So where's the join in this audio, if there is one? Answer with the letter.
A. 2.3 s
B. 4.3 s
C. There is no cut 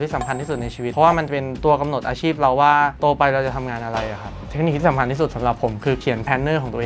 B